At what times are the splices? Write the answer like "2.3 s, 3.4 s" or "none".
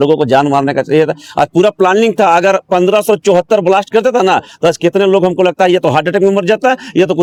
none